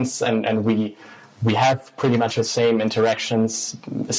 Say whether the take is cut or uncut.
uncut